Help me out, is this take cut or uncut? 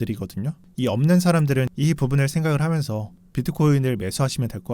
cut